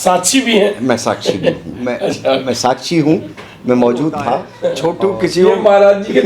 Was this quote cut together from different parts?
yes; 1 cut; at 4.5 s

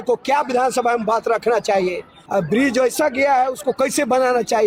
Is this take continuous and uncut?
yes; 0 cuts

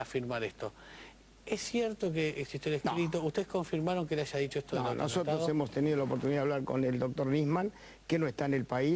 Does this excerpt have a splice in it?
yes; 1 cut; at 8.0 s

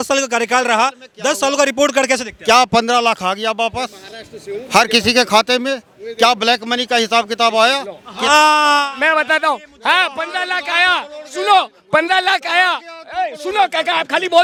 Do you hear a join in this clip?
no; 0 cuts

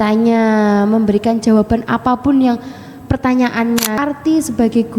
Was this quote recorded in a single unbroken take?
no; 1 cut; at 3.8 s

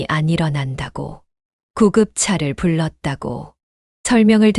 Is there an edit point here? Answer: no; 0 cuts

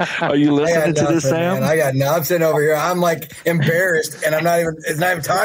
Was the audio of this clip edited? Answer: no; 0 cuts

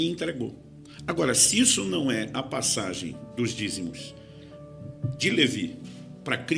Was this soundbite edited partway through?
yes; 1 cut; at 2.3 s

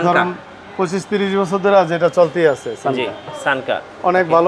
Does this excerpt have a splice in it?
no; 0 cuts

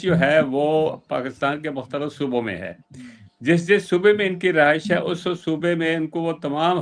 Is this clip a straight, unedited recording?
yes; 0 cuts

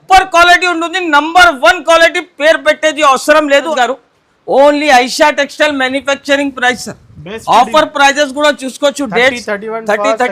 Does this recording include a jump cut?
yes; 1 cut; at 3.7 s

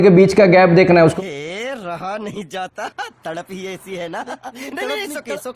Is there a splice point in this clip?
yes; 1 cut; at 1.1 s

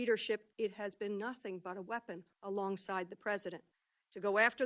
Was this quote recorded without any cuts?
yes; 0 cuts

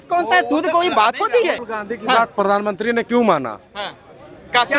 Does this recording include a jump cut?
yes; 1 cut; at 1.7 s

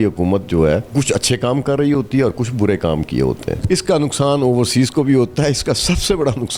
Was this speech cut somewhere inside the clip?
yes; 2 cuts; at 0.9 s, 3.6 s

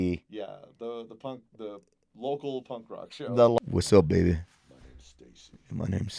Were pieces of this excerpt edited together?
yes; 1 cut; at 3.6 s

